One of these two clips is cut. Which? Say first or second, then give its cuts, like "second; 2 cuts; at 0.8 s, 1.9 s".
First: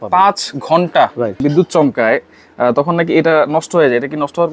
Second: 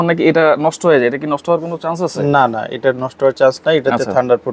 first; 1 cut; at 1.4 s